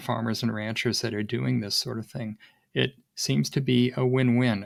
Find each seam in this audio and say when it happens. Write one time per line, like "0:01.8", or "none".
none